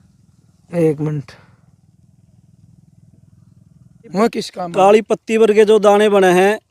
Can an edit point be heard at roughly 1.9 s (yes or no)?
no